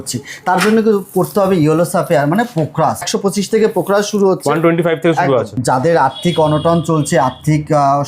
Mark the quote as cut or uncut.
cut